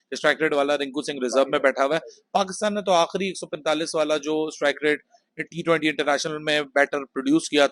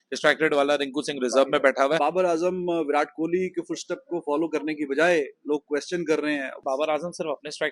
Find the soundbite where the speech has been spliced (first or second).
second